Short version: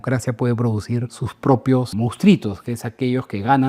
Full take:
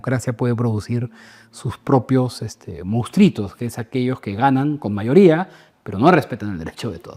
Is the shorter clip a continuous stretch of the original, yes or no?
no